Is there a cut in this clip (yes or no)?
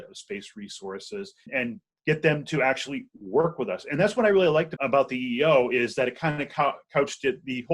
yes